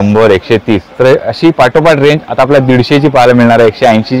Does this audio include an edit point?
no; 0 cuts

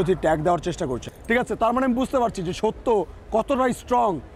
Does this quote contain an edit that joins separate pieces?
yes; 1 cut; at 1.1 s

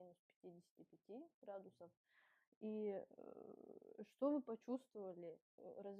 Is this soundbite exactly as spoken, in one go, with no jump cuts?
yes; 0 cuts

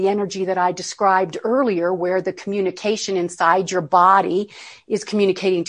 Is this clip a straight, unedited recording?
yes; 0 cuts

